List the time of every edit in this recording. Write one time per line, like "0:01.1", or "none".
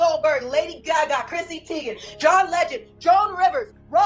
none